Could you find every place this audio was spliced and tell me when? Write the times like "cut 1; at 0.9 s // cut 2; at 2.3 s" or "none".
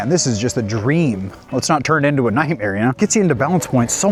none